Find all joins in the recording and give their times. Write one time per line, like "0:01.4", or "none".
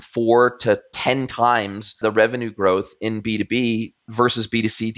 0:02.0
0:04.1